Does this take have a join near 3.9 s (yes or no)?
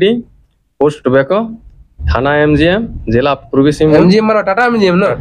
yes